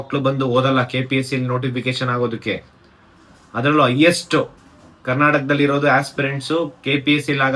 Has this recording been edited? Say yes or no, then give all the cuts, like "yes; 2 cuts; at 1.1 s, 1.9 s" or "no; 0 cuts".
no; 0 cuts